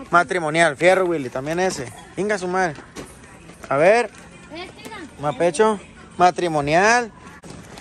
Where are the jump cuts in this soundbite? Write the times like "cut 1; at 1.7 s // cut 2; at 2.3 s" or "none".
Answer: none